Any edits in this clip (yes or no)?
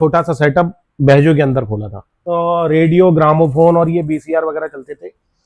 yes